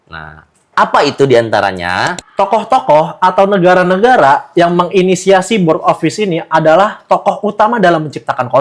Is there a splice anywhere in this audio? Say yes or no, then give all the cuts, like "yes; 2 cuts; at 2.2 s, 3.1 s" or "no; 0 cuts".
yes; 1 cut; at 2.2 s